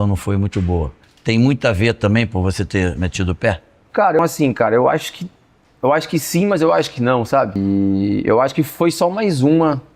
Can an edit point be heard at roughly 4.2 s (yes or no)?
yes